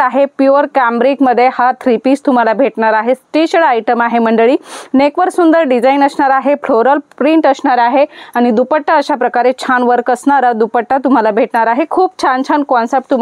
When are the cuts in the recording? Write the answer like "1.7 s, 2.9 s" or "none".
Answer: none